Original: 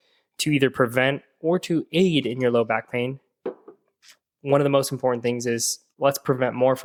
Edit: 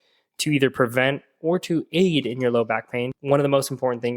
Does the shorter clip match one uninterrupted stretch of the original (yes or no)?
no